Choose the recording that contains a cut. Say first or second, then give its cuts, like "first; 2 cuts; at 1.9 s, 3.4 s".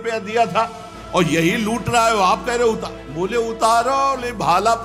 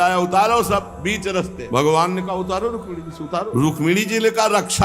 second; 2 cuts; at 1.6 s, 3.5 s